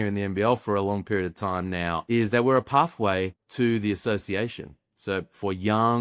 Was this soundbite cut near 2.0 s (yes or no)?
yes